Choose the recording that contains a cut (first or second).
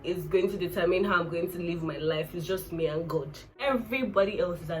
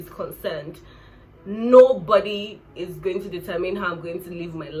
first